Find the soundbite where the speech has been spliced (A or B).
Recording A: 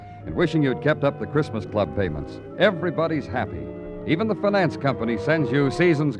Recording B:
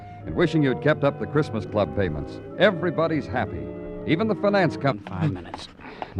A